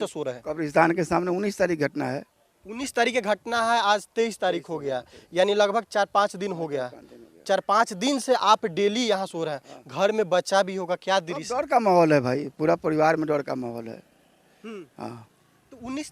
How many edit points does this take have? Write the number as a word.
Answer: zero